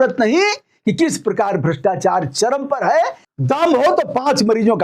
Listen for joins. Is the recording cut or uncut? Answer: cut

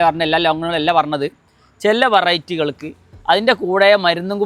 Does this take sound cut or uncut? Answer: uncut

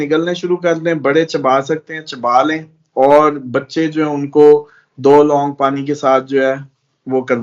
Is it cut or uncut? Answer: uncut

